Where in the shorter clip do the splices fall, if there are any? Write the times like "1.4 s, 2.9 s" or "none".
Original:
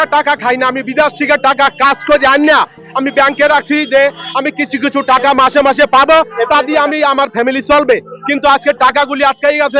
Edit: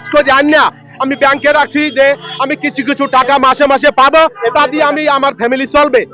none